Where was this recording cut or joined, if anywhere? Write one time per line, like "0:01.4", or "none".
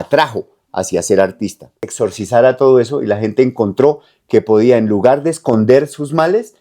0:01.9